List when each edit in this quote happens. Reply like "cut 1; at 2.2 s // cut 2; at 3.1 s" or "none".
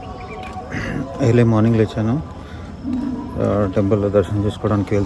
none